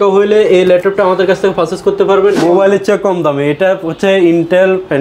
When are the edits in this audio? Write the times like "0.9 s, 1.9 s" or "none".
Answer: 2.4 s